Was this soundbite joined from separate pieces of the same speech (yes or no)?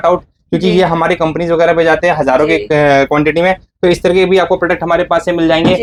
no